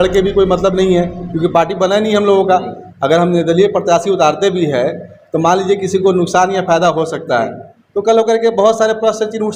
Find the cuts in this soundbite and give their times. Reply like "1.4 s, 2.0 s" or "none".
none